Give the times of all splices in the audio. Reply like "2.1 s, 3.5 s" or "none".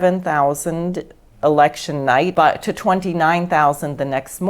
2.3 s